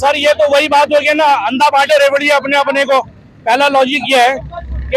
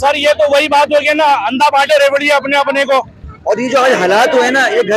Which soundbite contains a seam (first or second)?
second